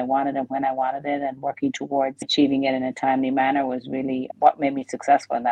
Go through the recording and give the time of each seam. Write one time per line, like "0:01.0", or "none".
0:02.3